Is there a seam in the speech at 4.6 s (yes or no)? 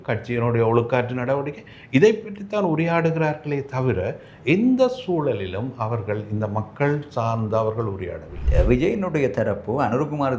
no